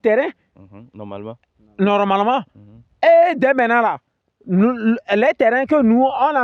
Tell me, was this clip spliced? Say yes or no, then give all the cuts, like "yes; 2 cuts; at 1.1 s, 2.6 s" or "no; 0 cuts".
no; 0 cuts